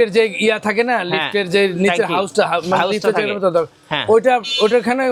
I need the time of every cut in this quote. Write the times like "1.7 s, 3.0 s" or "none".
none